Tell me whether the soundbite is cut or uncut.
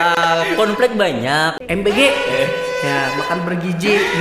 cut